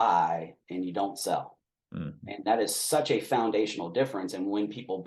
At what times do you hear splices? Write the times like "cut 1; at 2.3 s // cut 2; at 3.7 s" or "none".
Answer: none